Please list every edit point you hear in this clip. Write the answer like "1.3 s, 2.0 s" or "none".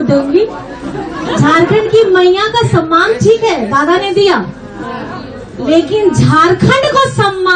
none